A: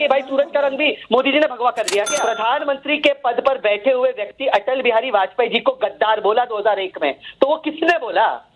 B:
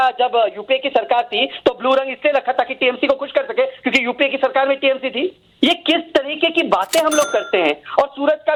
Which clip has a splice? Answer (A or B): A